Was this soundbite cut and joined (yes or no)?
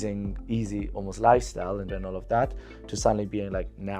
yes